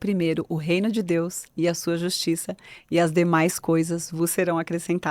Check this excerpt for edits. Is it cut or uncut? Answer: uncut